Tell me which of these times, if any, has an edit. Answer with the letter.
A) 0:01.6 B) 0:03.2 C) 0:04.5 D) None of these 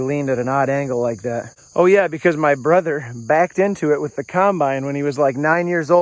A